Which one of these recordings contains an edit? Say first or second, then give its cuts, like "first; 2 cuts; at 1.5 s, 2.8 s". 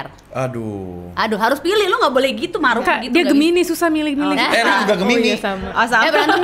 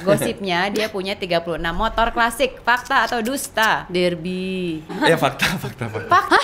second; 1 cut; at 4.9 s